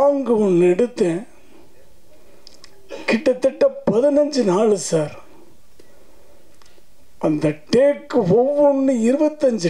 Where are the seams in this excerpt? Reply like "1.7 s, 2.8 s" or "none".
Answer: none